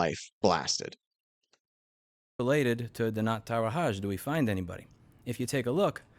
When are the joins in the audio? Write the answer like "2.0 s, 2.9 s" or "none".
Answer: none